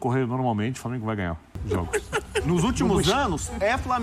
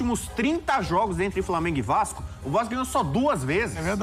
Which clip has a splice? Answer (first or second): first